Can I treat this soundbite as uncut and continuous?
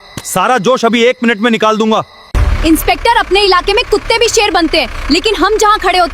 no; 1 cut; at 2.4 s

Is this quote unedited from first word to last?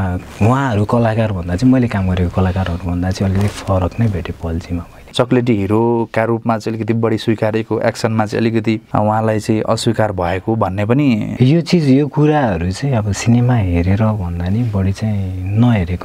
no; 3 cuts; at 5.1 s, 8.8 s, 11.3 s

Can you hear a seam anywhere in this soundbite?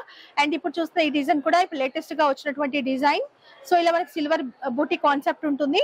no; 0 cuts

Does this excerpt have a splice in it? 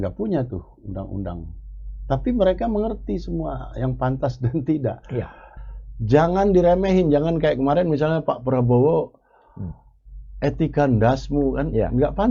yes; 1 cut; at 5.5 s

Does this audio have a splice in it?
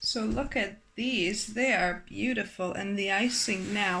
no; 0 cuts

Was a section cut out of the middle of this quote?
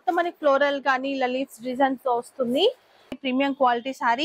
yes; 1 cut; at 3.2 s

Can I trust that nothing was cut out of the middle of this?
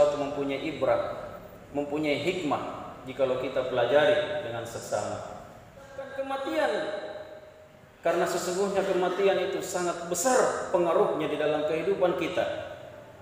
no; 1 cut; at 6.1 s

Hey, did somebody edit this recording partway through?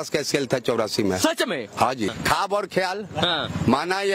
yes; 1 cut; at 2.1 s

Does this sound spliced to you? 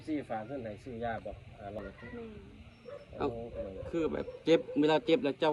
yes; 1 cut; at 1.8 s

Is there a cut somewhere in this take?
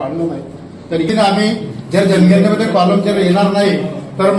yes; 1 cut; at 1.1 s

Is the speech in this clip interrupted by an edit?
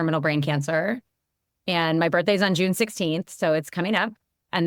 no; 0 cuts

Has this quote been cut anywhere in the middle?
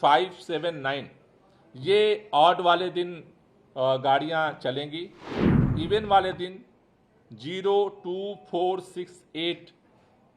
yes; 1 cut; at 5.7 s

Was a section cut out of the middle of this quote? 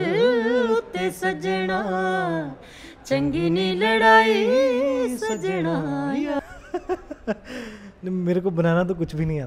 yes; 1 cut; at 6.4 s

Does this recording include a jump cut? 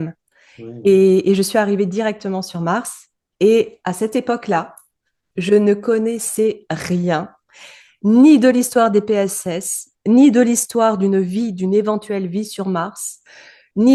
no; 0 cuts

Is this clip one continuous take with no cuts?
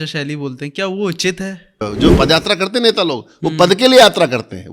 no; 1 cut; at 1.9 s

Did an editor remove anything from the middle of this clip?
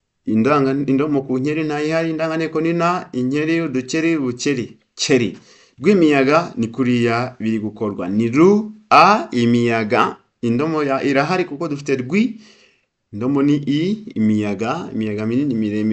no; 0 cuts

